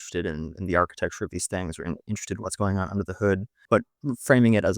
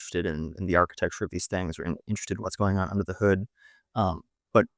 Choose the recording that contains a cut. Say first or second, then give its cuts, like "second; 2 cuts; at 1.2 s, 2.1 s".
first; 1 cut; at 3.5 s